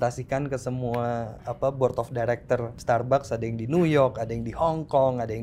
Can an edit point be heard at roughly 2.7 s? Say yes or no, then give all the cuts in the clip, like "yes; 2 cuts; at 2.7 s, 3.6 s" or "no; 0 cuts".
yes; 1 cut; at 2.7 s